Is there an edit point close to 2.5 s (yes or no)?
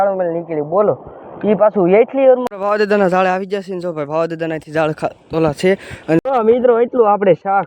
yes